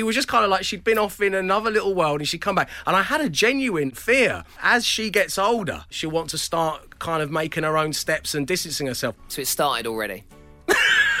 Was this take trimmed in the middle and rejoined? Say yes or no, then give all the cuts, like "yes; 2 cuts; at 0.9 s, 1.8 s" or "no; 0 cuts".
yes; 3 cuts; at 4.2 s, 5.9 s, 9.3 s